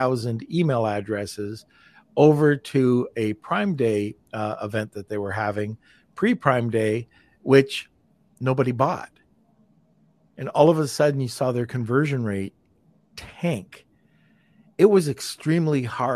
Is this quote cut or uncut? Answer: uncut